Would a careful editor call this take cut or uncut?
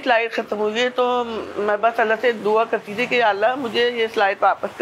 uncut